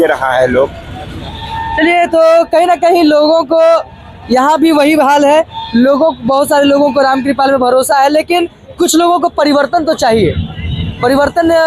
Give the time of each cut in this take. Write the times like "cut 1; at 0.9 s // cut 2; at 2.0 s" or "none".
none